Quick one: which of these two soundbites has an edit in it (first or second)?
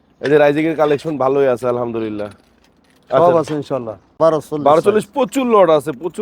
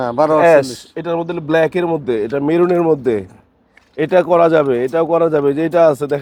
first